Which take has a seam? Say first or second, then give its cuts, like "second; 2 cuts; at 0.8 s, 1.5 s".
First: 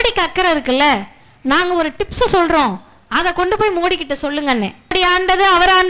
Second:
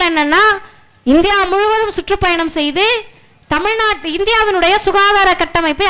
first; 1 cut; at 4.9 s